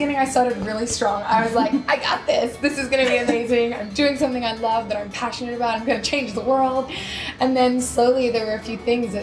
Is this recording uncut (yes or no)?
yes